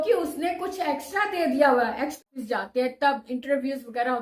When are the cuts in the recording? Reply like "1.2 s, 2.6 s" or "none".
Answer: 2.2 s